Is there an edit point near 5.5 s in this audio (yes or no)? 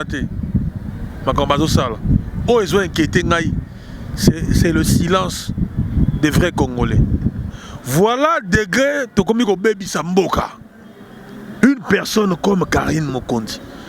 no